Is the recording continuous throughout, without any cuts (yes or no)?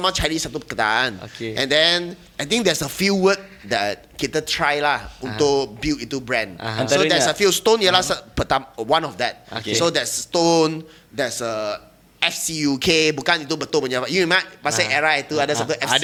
yes